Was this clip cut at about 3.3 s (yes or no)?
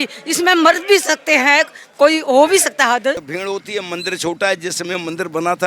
yes